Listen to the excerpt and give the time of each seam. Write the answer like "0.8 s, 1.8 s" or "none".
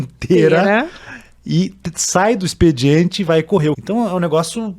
3.8 s

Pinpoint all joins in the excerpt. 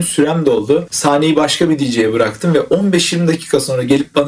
0.9 s

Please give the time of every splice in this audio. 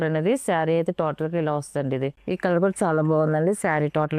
none

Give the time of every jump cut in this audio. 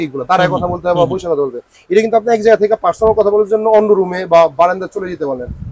none

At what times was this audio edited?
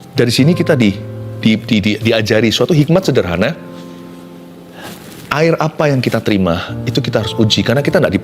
none

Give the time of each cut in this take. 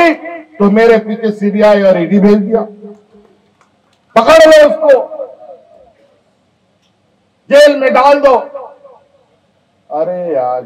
none

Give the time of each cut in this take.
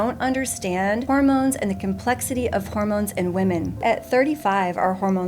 1.0 s, 3.8 s

